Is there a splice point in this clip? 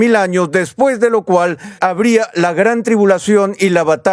no; 0 cuts

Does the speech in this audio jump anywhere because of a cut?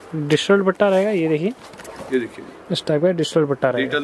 no; 0 cuts

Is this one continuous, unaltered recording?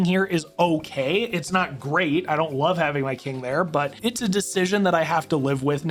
yes; 0 cuts

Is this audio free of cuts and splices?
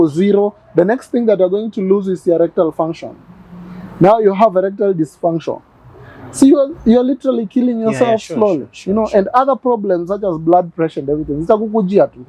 yes; 0 cuts

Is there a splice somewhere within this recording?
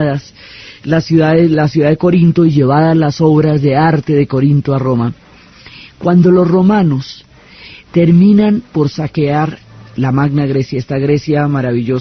no; 0 cuts

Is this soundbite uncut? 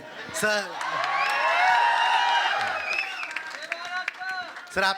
yes; 0 cuts

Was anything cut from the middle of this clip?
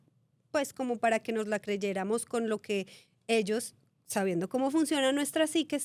no; 0 cuts

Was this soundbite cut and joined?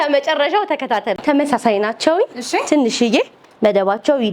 yes; 1 cut; at 1.2 s

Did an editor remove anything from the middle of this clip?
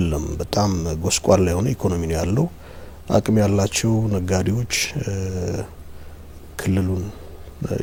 no; 0 cuts

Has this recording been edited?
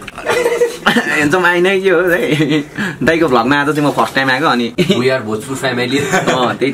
yes; 1 cut; at 4.7 s

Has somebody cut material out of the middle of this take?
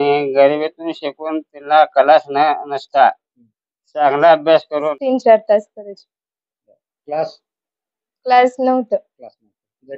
yes; 1 cut; at 5.0 s

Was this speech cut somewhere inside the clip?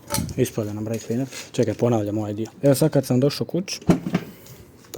yes; 2 cuts; at 1.4 s, 2.5 s

